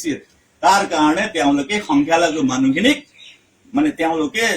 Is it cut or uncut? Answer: cut